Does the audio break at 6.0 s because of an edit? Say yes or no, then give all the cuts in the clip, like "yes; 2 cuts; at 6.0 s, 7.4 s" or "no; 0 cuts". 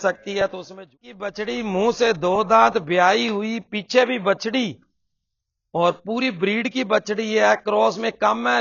no; 1 cut; at 1.1 s